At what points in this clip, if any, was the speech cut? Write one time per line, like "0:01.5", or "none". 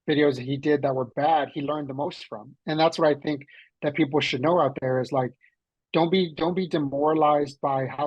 none